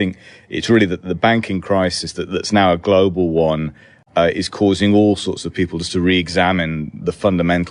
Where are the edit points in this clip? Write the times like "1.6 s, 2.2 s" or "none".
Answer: 1.0 s